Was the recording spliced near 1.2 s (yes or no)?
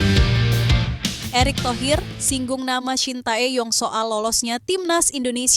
yes